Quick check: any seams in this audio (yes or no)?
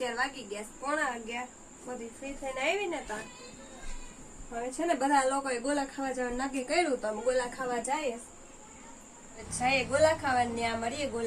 yes